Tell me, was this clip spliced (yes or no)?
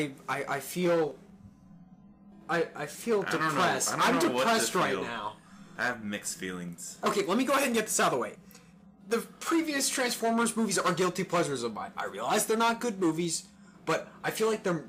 no